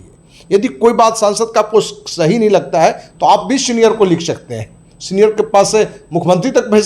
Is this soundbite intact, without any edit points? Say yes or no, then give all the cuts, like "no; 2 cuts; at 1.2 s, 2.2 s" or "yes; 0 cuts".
yes; 0 cuts